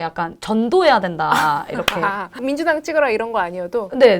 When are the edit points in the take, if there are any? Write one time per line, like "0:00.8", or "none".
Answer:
0:02.4